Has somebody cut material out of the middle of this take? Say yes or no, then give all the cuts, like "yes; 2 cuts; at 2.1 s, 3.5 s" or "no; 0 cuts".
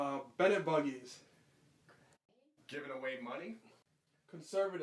no; 0 cuts